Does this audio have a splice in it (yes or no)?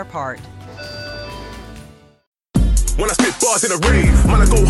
yes